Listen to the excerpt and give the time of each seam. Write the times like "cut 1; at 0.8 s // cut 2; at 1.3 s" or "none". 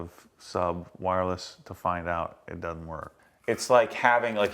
cut 1; at 3.1 s